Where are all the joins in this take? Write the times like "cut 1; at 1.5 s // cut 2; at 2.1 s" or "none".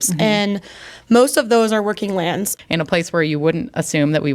cut 1; at 2.5 s